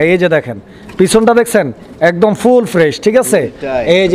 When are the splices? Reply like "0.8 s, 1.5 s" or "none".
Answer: none